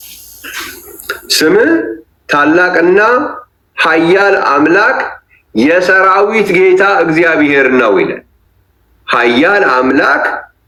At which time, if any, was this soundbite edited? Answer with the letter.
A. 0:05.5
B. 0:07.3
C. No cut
C